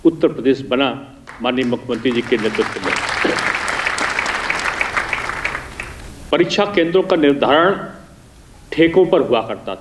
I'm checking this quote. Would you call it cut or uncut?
cut